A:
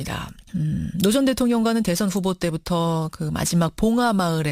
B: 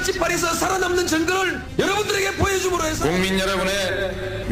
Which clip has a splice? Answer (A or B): A